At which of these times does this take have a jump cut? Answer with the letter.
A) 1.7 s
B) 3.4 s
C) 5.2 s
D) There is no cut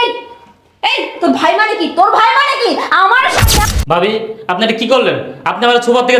B